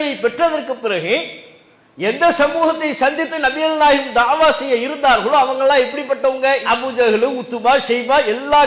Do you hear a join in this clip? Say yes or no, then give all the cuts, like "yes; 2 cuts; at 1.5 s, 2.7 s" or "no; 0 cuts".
no; 0 cuts